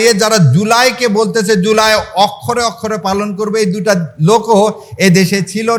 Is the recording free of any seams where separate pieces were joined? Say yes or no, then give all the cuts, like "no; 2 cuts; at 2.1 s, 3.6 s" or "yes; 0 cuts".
yes; 0 cuts